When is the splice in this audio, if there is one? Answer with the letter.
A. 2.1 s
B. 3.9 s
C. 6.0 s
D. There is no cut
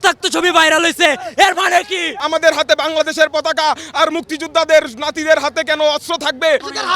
A